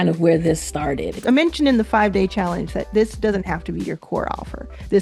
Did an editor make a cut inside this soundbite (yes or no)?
yes